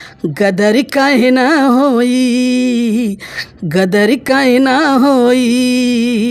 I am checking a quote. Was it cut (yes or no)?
no